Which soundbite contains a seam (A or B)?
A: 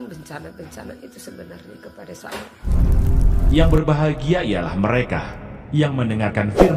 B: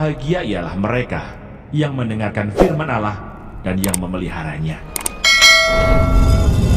A